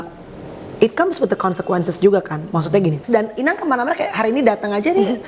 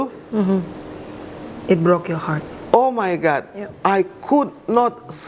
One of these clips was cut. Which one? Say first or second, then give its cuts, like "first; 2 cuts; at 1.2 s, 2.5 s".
first; 1 cut; at 3.0 s